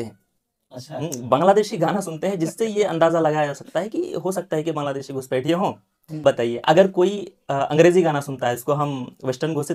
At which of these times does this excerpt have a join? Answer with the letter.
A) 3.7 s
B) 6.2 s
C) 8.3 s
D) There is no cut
B